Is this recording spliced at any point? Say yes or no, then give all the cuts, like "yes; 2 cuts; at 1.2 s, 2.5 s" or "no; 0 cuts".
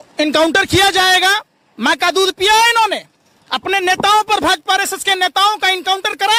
no; 0 cuts